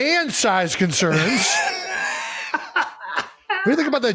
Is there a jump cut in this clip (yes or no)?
no